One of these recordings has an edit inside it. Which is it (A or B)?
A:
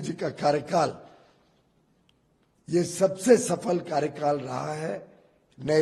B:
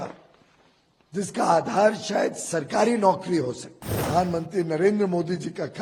B